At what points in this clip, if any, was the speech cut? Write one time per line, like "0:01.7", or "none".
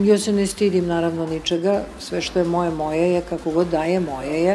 none